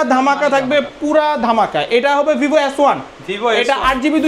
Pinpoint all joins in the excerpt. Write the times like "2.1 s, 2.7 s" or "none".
none